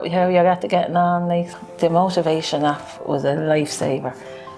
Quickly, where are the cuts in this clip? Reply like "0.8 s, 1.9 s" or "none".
1.5 s